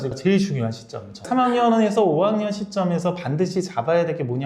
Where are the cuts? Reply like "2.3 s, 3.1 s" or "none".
1.2 s